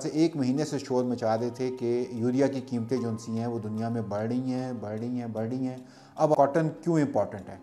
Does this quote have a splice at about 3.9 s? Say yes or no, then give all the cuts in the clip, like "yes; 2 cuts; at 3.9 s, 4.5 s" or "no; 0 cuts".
no; 1 cut; at 6.3 s